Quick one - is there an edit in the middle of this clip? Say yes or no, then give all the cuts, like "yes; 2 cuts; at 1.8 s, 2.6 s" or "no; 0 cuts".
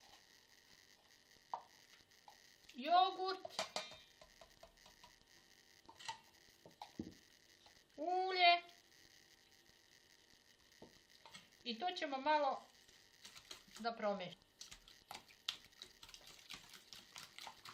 no; 0 cuts